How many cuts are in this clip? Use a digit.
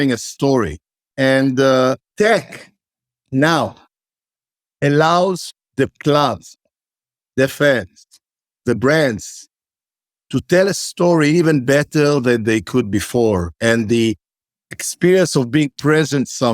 3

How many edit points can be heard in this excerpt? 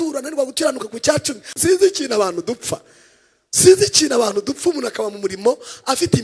1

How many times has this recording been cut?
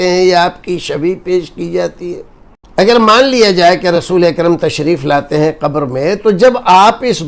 1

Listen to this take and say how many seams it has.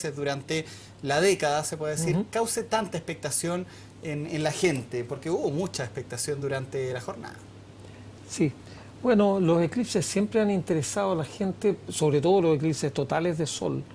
1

